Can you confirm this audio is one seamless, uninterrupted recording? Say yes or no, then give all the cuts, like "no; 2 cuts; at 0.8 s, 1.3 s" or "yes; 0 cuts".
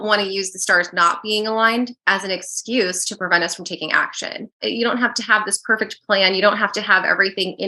no; 1 cut; at 4.6 s